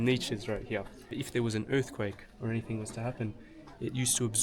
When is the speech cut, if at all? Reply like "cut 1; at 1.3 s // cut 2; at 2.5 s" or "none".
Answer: cut 1; at 1.1 s